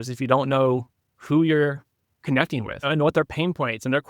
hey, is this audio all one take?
no; 1 cut; at 2.9 s

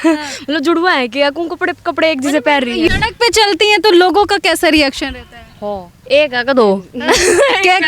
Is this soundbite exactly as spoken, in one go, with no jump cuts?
no; 1 cut; at 2.9 s

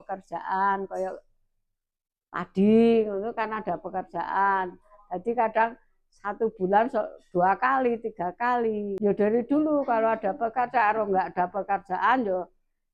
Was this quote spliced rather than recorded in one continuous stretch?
no; 0 cuts

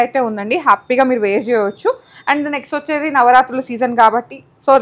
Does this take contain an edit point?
no; 0 cuts

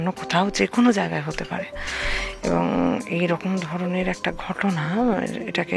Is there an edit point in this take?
no; 0 cuts

